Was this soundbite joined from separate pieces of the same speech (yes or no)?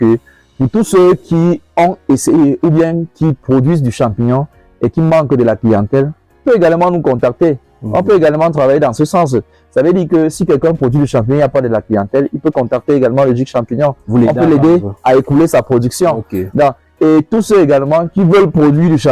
no